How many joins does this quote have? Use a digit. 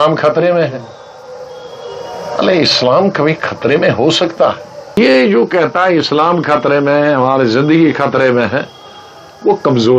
1